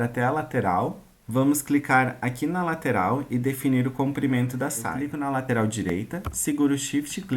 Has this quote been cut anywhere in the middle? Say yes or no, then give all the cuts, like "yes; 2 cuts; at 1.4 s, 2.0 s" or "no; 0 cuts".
yes; 1 cut; at 5.0 s